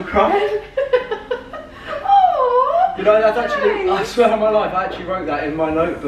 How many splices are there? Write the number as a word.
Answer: zero